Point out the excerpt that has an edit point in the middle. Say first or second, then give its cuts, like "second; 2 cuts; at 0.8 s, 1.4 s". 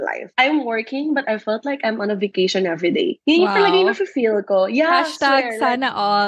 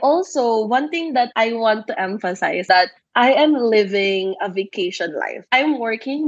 second; 1 cut; at 2.6 s